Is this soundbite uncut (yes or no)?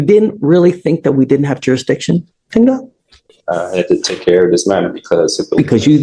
yes